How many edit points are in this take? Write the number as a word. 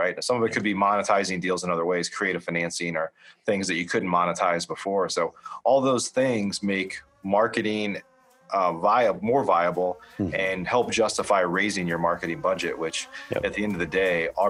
zero